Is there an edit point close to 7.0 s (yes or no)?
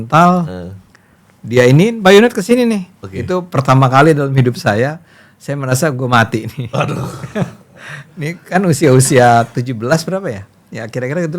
no